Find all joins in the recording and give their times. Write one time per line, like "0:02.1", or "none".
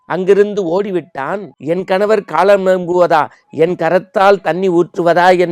0:01.5